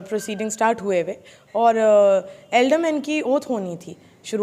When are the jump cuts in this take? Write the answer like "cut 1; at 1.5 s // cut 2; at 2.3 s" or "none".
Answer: none